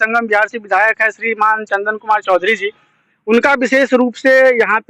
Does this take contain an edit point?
no; 0 cuts

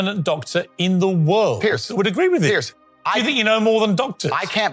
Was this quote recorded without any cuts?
yes; 0 cuts

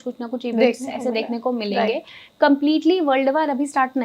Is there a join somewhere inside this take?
no; 0 cuts

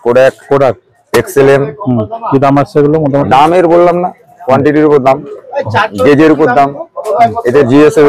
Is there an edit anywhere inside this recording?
no; 0 cuts

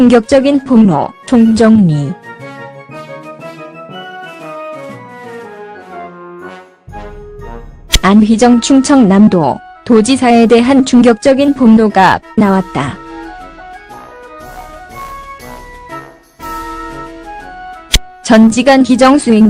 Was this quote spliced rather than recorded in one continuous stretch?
no; 0 cuts

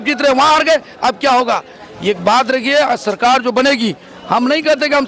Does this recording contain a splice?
no; 0 cuts

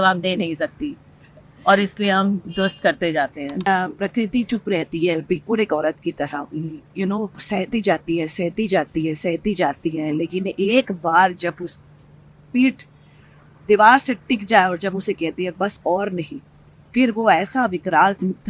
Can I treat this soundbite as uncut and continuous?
no; 1 cut; at 3.7 s

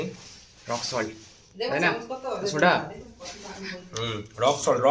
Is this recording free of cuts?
yes; 0 cuts

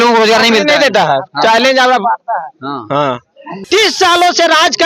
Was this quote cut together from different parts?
yes; 1 cut; at 3.6 s

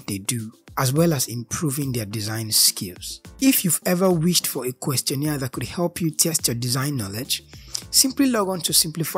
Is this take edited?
no; 0 cuts

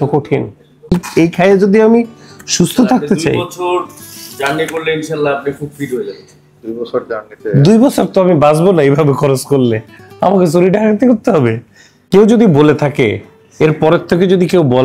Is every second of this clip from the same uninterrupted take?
no; 2 cuts; at 1.0 s, 11.9 s

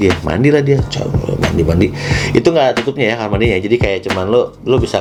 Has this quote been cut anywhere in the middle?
no; 0 cuts

